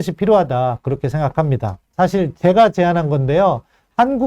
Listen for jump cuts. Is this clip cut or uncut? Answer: cut